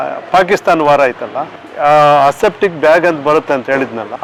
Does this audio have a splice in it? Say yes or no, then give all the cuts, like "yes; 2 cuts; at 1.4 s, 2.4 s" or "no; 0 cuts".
no; 0 cuts